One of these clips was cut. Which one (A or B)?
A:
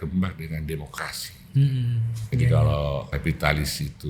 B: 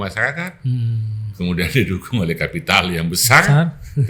A